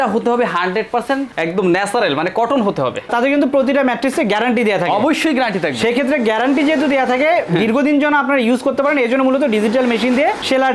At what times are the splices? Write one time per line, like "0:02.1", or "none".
0:03.1